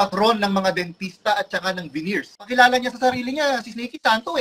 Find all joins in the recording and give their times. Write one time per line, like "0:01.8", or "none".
0:02.5